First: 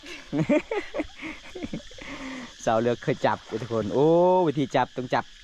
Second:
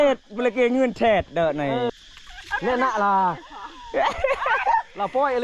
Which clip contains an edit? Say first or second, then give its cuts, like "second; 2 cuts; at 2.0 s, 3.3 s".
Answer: second; 1 cut; at 1.9 s